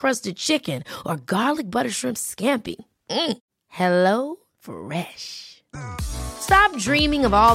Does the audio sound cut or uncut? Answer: uncut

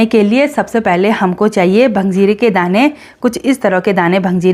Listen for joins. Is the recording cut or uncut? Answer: uncut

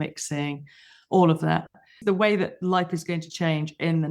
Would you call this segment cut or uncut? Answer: cut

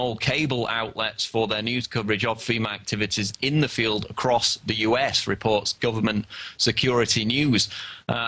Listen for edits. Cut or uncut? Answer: cut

